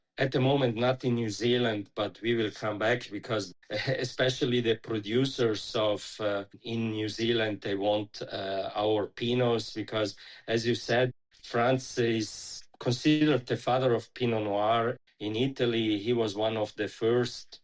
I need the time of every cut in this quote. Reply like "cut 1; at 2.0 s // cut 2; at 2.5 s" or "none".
none